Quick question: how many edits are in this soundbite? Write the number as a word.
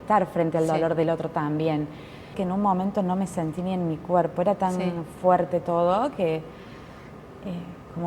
one